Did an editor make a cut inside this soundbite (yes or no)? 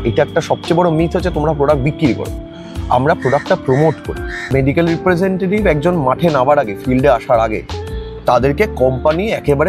yes